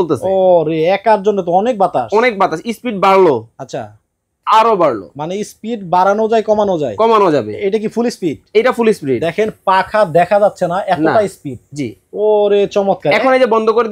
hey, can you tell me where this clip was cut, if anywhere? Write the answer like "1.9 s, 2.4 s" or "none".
none